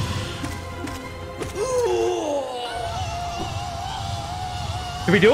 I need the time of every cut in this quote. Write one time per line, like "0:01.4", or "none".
none

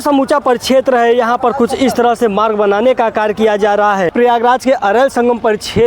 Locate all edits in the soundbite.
0:04.1

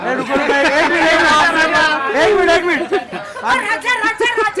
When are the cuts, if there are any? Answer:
0:03.1

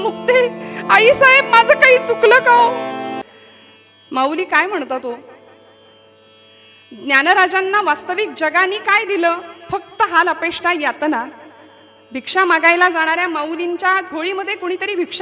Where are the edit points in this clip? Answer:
0:03.2

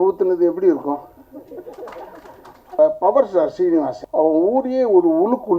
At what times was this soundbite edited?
0:02.7
0:04.0

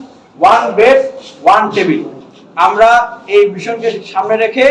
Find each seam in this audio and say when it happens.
none

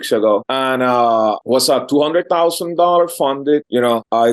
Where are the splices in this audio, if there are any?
none

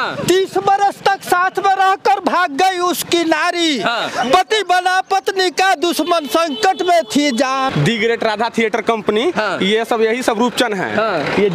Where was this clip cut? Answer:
0:07.7

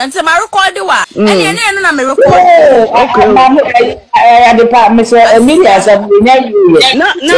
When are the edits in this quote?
0:01.1

